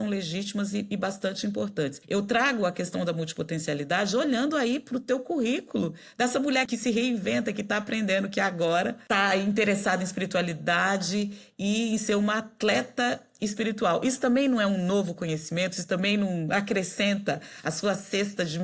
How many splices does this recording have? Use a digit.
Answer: 3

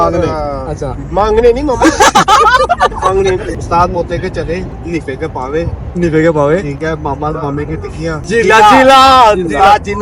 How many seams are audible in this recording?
3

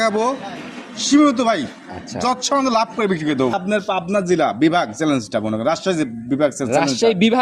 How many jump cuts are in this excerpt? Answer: 1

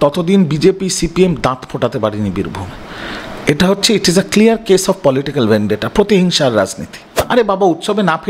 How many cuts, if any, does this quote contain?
1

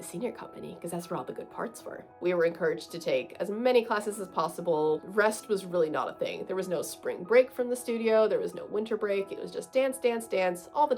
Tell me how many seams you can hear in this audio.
2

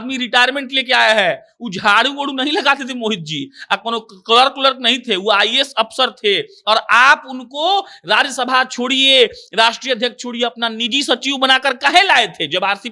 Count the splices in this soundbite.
0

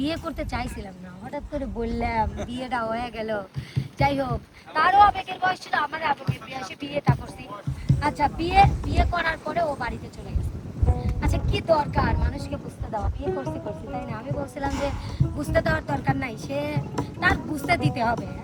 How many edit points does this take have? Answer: 0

